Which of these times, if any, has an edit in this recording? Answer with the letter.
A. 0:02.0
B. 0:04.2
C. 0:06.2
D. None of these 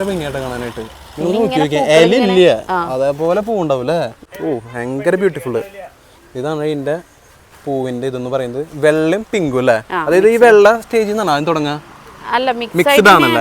B